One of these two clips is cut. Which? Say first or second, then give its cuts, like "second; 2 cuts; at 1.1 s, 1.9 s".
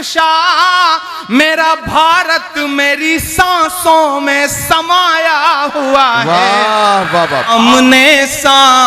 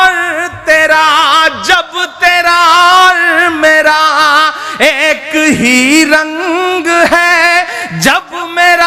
first; 1 cut; at 7.5 s